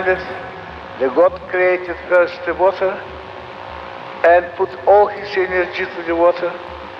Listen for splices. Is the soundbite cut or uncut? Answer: uncut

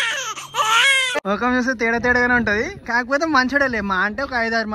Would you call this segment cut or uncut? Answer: cut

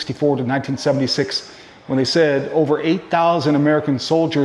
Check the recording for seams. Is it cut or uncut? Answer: uncut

